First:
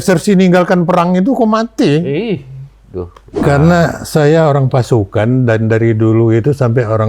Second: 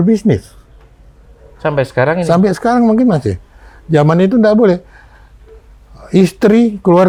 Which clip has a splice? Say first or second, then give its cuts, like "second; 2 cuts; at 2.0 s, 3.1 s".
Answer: first; 1 cut; at 3.4 s